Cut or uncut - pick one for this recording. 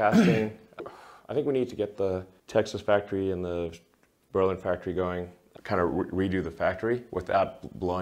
cut